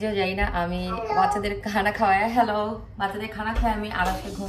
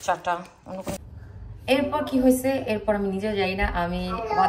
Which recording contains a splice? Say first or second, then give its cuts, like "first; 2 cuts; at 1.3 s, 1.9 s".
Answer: second; 1 cut; at 1.1 s